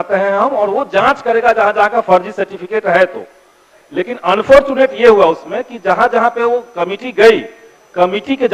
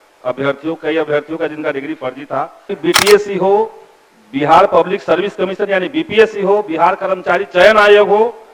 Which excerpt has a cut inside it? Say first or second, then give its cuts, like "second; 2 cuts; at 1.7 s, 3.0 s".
second; 1 cut; at 2.7 s